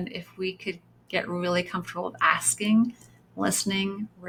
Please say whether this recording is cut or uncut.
uncut